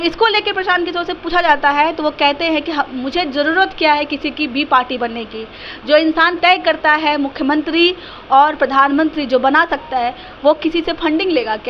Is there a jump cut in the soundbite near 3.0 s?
no; 0 cuts

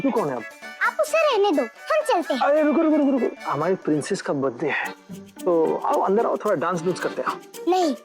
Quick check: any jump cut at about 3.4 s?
yes; 2 cuts; at 1.8 s, 3.4 s

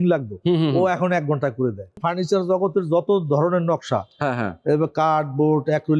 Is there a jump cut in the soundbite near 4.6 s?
no; 1 cut; at 2.0 s

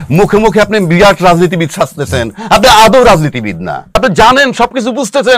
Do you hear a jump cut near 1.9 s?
no; 1 cut; at 3.9 s

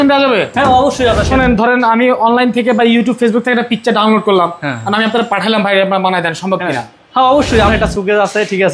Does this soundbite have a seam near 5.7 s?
no; 2 cuts; at 1.3 s, 7.7 s

